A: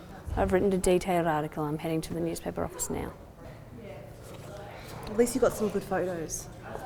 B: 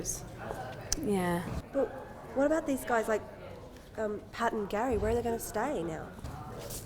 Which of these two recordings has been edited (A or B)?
B